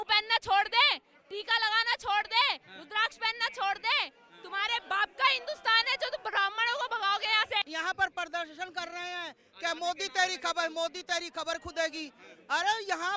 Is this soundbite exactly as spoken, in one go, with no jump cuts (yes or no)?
no